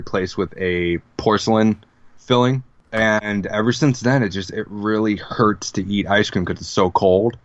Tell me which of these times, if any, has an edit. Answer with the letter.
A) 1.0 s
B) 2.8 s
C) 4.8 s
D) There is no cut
B